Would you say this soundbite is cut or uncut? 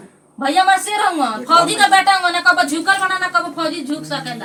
uncut